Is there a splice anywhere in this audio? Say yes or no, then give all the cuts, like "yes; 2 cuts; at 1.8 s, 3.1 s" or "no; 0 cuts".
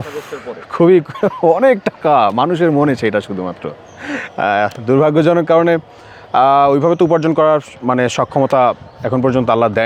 no; 0 cuts